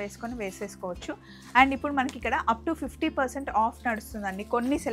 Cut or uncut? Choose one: uncut